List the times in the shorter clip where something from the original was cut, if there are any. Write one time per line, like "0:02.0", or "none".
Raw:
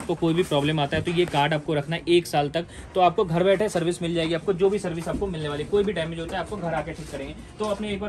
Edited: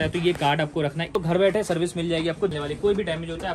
0:01.2
0:02.5